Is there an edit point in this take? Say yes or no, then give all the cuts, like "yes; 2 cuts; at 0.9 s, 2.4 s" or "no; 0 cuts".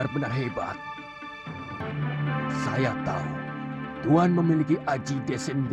no; 0 cuts